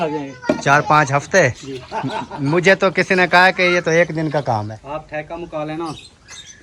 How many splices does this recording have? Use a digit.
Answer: 1